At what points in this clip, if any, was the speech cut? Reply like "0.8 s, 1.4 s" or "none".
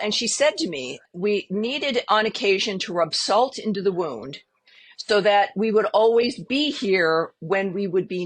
1.0 s